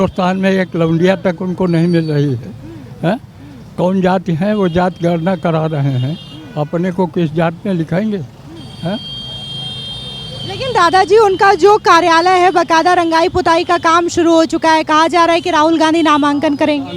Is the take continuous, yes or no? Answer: yes